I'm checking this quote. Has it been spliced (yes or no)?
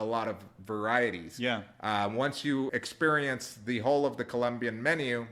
no